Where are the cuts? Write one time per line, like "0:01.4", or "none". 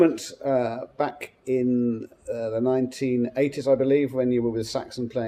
none

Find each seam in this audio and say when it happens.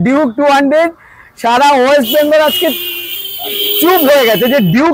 none

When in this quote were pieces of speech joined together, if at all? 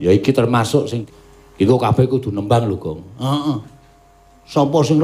0:01.0

